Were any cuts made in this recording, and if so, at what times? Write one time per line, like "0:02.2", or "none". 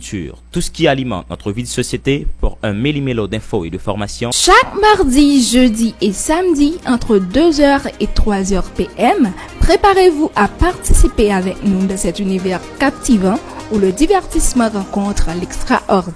none